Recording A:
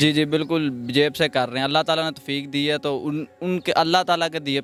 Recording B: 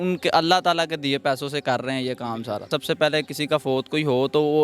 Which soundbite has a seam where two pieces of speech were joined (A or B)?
B